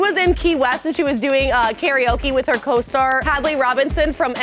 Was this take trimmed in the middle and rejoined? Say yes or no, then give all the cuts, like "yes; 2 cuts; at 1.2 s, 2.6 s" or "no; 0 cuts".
no; 0 cuts